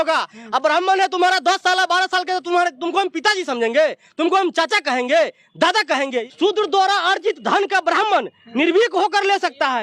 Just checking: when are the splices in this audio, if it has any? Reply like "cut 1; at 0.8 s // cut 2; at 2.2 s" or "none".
cut 1; at 6.3 s